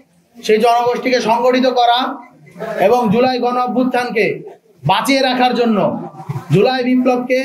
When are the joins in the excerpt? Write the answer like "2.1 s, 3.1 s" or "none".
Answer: none